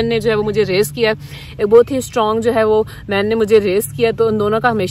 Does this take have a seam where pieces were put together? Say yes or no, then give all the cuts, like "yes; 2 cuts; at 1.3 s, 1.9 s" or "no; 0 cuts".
no; 0 cuts